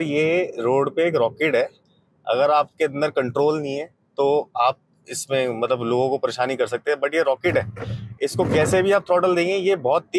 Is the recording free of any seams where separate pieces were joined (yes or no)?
yes